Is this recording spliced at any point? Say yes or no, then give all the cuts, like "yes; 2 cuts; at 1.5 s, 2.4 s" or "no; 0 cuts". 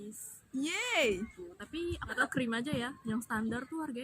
yes; 1 cut; at 2.2 s